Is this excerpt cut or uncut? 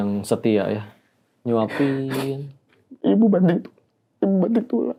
uncut